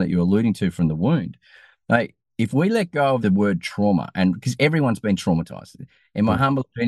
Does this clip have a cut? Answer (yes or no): yes